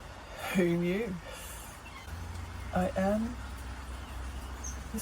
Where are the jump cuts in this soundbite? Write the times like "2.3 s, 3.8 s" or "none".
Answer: 2.1 s